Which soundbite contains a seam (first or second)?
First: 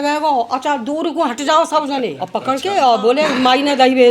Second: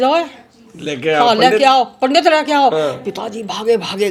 first